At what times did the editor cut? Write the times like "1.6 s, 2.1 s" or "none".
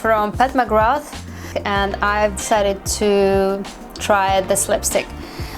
1.5 s